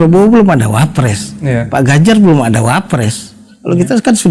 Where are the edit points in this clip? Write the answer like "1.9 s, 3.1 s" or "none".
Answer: none